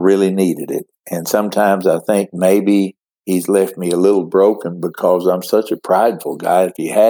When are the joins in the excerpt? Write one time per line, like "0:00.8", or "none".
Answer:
none